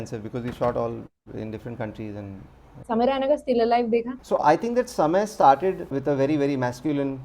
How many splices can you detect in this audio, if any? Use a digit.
3